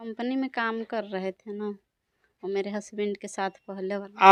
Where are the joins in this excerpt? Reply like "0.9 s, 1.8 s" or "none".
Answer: none